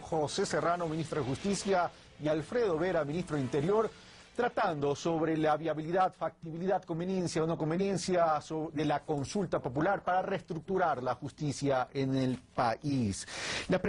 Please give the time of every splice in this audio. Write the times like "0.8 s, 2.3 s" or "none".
11.7 s